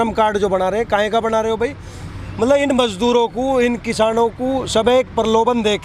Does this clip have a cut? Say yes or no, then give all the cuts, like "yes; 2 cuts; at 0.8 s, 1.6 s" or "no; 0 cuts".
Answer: no; 0 cuts